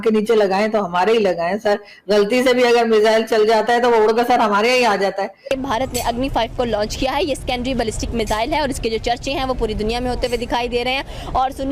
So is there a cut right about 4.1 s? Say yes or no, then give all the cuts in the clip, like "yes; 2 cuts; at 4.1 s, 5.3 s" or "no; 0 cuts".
no; 1 cut; at 5.4 s